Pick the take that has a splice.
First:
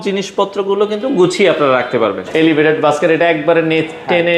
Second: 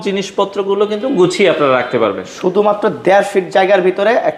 first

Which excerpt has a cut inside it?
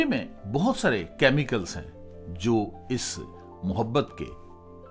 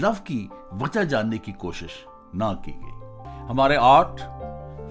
second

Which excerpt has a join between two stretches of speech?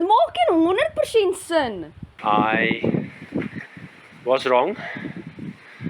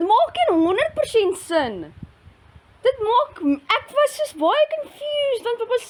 first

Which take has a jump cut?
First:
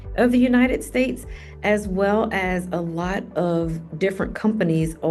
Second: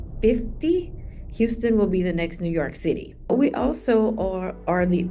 second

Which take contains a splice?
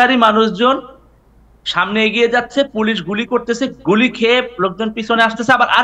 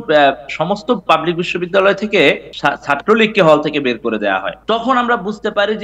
second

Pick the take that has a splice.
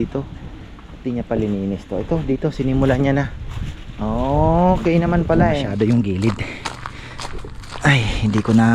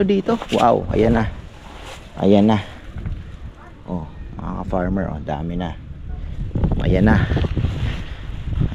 first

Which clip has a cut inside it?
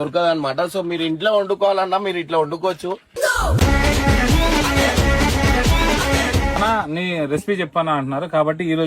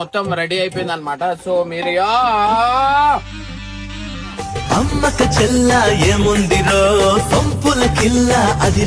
first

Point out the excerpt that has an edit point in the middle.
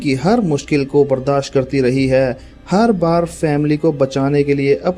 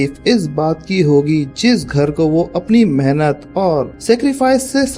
second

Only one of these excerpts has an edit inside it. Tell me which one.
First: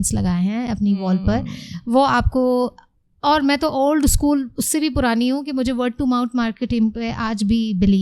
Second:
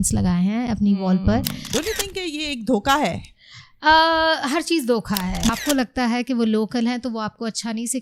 second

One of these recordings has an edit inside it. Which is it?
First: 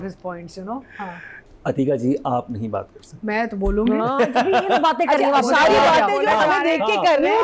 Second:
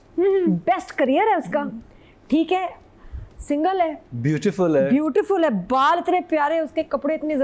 first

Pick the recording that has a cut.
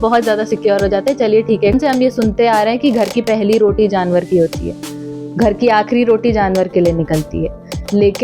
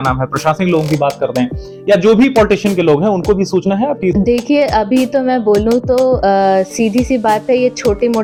first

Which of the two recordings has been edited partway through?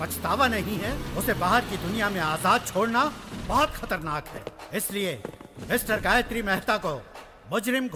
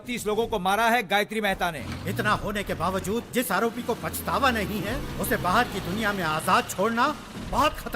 second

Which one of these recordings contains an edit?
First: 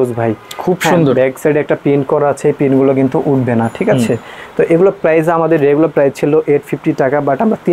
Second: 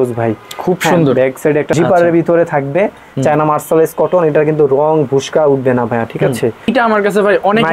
second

